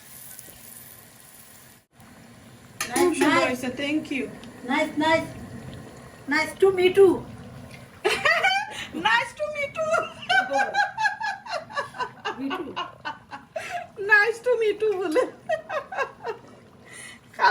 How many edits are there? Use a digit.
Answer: 1